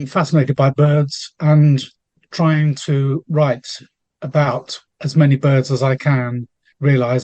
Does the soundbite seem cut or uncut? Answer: cut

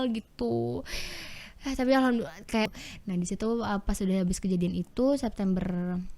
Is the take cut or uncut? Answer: cut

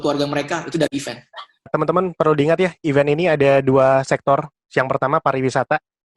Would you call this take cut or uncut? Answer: cut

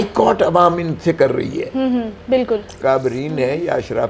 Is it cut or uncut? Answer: cut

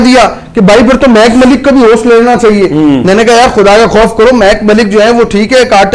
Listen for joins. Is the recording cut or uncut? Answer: uncut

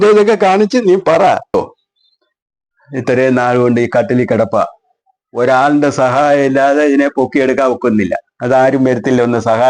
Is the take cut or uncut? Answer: cut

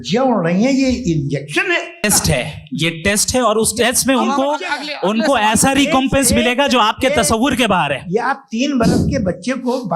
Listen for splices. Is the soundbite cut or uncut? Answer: cut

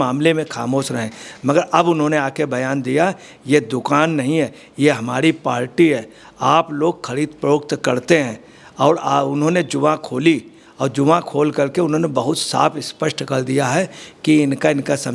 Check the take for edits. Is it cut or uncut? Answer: uncut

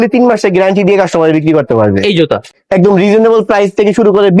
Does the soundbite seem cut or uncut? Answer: cut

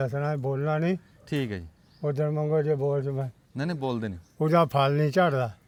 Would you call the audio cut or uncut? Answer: uncut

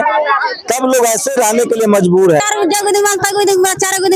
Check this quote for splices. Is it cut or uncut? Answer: cut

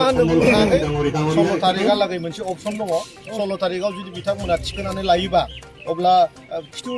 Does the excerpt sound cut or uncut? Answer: cut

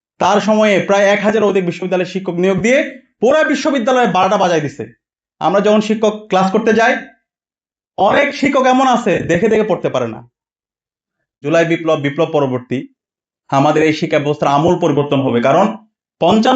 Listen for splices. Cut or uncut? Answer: cut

